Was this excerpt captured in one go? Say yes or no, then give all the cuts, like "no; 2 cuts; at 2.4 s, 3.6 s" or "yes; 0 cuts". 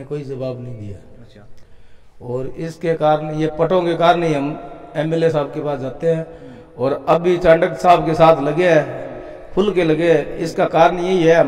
yes; 0 cuts